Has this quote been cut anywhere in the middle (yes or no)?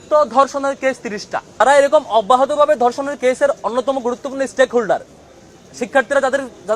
yes